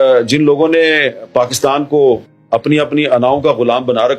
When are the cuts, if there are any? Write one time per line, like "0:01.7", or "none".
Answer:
none